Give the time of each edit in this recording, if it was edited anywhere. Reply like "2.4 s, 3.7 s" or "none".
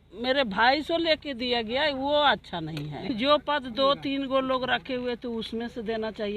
3.1 s